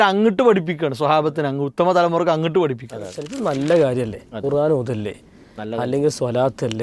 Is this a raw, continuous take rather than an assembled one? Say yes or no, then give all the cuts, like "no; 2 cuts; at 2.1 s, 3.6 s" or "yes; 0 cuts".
no; 1 cut; at 3.3 s